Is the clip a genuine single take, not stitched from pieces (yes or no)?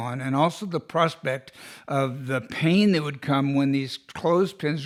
yes